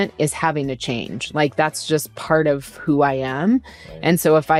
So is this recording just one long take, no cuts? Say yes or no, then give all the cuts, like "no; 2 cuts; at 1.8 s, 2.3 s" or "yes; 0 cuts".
yes; 0 cuts